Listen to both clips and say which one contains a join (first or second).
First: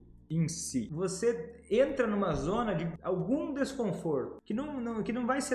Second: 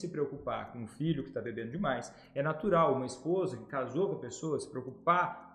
first